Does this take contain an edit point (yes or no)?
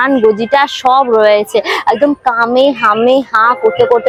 no